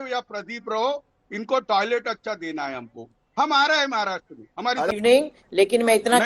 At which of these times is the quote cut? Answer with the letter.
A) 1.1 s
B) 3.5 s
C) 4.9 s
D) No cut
C